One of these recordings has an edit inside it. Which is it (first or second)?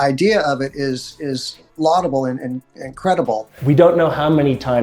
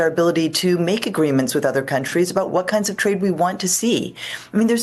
first